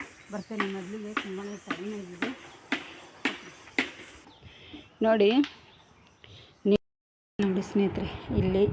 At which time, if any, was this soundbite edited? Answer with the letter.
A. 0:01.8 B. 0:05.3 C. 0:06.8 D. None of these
C